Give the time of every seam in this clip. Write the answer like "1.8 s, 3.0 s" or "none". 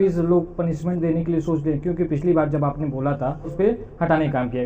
3.5 s